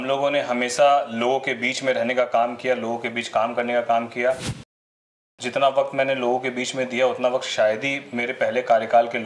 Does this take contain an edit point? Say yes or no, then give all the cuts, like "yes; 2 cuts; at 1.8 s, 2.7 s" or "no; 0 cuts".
yes; 1 cut; at 4.7 s